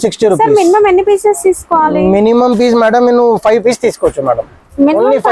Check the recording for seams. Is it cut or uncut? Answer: uncut